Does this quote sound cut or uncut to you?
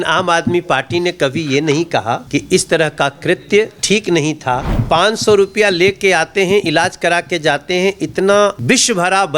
cut